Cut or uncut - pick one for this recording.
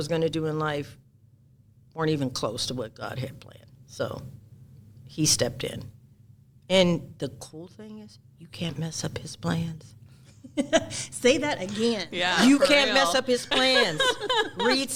uncut